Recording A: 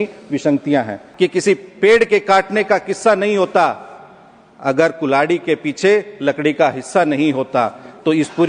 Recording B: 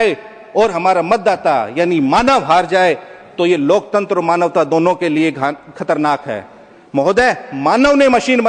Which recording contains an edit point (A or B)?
A